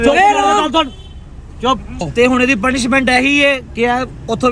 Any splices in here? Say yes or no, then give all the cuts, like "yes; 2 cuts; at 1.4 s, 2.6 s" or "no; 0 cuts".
yes; 1 cut; at 2.1 s